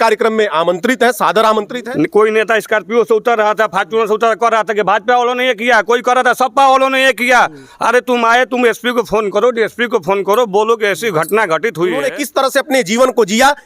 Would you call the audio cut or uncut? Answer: cut